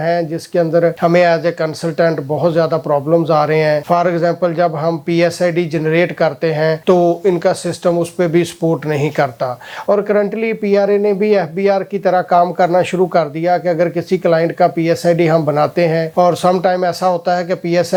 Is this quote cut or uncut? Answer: uncut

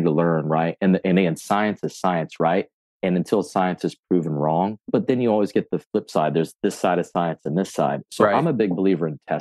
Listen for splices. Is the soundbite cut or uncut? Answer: cut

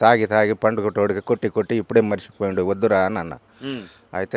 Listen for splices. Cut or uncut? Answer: uncut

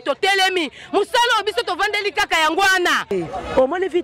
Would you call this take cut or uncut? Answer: cut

